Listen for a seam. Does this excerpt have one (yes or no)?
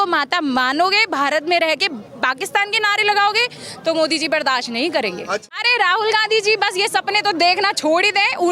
yes